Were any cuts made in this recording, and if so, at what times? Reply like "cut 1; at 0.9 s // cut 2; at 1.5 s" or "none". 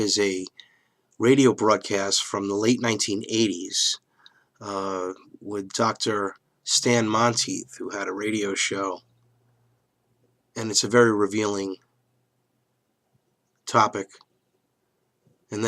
cut 1; at 6.2 s